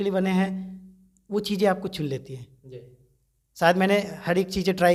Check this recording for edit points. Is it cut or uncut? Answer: uncut